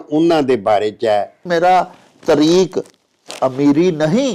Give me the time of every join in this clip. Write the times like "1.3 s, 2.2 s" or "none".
1.4 s